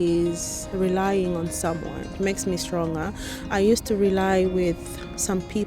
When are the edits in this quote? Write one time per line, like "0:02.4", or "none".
0:02.1